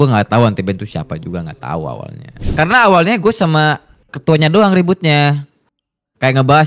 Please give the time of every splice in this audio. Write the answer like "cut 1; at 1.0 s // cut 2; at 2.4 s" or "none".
cut 1; at 2.4 s

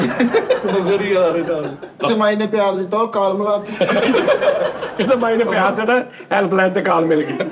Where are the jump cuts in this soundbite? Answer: cut 1; at 2.0 s

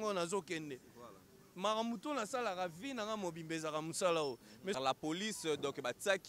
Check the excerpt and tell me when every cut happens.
cut 1; at 4.8 s

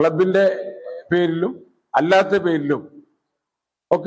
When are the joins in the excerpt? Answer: none

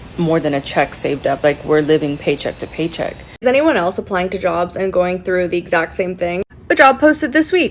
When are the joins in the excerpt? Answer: cut 1; at 3.3 s

